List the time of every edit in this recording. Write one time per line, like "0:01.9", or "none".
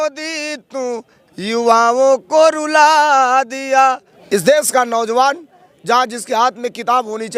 0:04.1